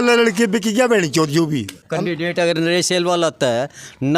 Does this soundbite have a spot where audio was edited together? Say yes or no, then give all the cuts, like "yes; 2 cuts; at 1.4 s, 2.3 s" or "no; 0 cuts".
yes; 1 cut; at 1.8 s